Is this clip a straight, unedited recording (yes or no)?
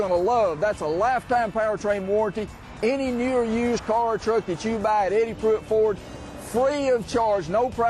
yes